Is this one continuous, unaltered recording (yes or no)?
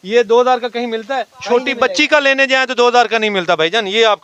yes